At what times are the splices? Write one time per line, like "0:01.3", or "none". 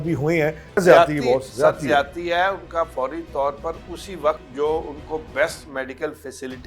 0:00.8
0:04.5